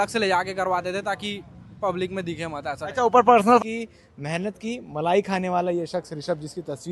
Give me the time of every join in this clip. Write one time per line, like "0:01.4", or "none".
0:03.6